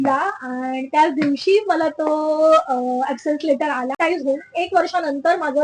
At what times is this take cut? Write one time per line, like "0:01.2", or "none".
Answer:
0:04.0